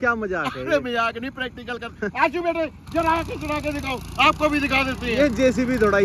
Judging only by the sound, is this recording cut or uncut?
uncut